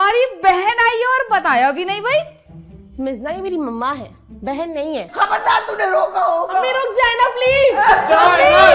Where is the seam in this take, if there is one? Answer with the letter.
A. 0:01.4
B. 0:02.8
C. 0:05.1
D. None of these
C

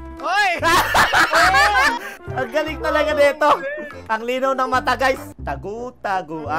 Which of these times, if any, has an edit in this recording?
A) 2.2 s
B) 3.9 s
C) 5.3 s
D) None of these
C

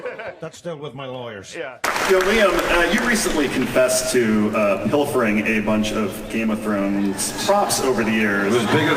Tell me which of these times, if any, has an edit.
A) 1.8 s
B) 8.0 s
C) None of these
A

